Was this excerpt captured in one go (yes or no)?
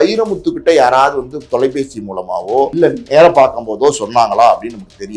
no